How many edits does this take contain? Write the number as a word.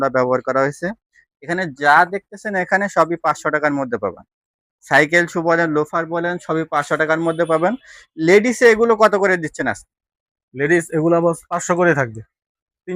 zero